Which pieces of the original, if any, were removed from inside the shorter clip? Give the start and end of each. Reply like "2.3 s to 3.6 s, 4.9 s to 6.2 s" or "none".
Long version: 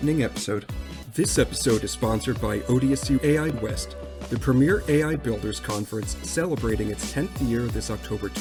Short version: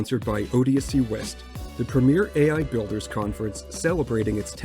3.2 s to 3.6 s